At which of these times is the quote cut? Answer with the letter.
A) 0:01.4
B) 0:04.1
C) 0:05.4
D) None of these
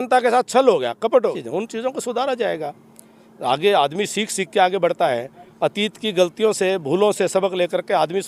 A